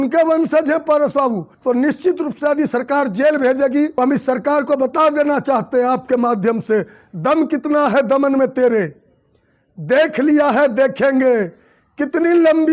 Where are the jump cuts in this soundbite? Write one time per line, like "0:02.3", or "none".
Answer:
0:01.5
0:03.9